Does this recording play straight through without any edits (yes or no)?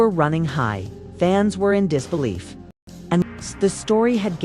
no